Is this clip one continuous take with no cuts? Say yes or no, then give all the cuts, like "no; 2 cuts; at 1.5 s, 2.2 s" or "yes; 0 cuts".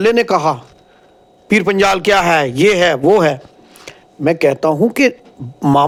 yes; 0 cuts